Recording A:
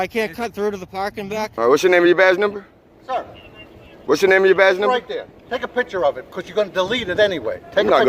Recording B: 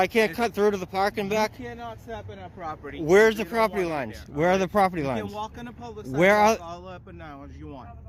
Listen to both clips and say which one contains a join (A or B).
A